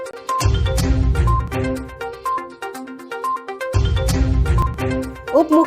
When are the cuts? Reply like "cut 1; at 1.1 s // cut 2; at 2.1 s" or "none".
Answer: cut 1; at 1.4 s